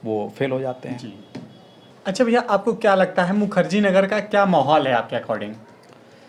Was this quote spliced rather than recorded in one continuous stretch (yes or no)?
no